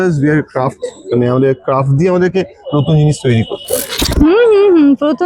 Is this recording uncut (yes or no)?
no